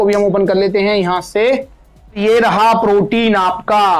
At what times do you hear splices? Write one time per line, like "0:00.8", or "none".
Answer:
0:02.2